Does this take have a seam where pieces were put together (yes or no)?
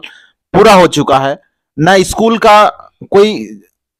no